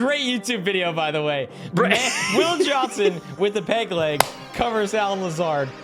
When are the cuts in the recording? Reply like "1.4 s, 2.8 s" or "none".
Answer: none

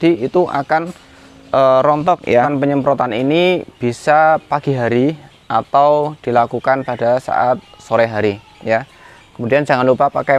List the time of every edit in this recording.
2.5 s

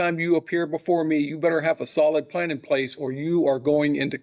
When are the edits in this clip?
none

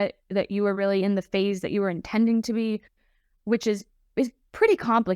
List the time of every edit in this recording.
none

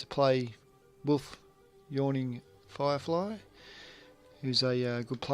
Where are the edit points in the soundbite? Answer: 1.9 s

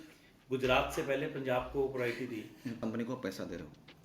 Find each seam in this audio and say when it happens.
2.8 s

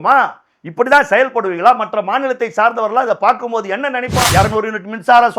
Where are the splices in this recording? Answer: 4.3 s

